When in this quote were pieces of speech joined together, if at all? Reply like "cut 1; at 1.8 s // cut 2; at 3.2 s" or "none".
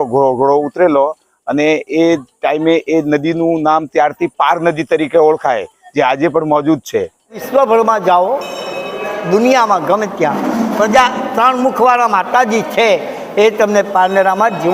cut 1; at 7.4 s